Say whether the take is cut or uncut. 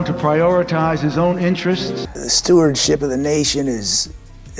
cut